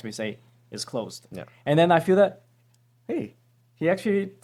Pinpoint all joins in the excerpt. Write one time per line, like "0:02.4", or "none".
none